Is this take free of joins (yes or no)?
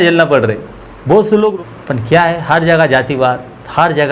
no